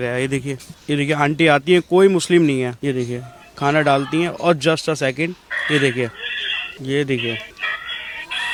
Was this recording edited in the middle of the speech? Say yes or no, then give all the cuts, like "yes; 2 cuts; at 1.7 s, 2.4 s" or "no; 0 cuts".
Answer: no; 0 cuts